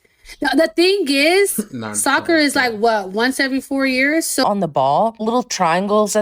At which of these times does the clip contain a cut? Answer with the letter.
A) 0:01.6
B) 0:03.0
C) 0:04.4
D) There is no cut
C